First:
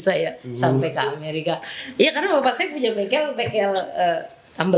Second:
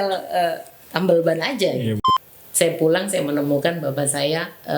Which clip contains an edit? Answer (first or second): second